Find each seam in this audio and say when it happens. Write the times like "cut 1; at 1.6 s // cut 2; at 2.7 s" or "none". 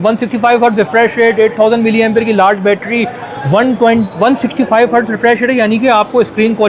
none